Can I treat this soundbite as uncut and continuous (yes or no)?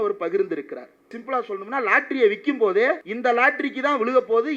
no